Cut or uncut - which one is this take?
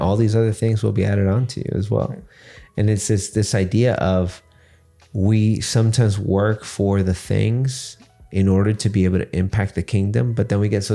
uncut